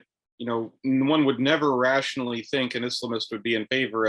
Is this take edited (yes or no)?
no